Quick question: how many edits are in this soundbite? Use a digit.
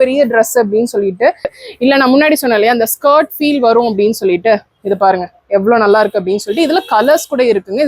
1